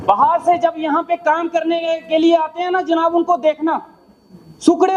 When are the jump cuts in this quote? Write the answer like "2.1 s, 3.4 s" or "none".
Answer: none